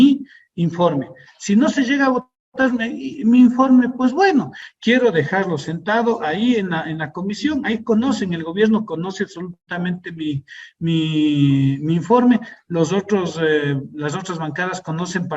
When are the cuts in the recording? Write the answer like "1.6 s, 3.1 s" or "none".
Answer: 4.6 s